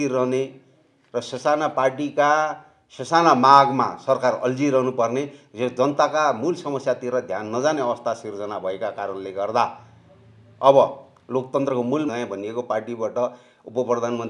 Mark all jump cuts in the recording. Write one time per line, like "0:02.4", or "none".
0:12.1